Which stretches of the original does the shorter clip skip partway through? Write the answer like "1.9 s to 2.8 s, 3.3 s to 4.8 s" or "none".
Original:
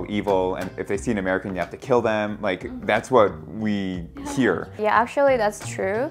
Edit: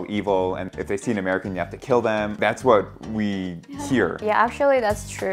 2.3 s to 2.8 s, 4.6 s to 4.7 s